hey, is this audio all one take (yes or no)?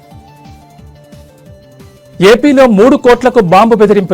no